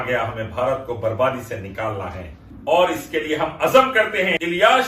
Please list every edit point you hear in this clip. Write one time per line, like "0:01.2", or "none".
none